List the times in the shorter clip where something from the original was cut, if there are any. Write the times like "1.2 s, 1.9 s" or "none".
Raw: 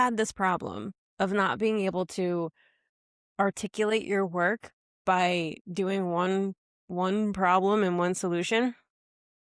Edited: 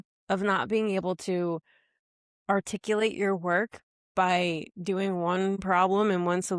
5.6 s